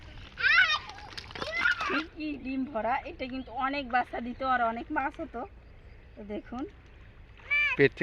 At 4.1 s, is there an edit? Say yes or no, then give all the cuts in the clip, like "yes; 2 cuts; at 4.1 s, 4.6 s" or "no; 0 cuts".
no; 1 cut; at 1.9 s